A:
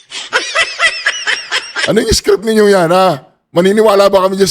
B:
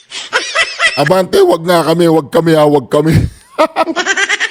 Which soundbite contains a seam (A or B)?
A